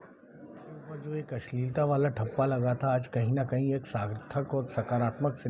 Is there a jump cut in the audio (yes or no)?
yes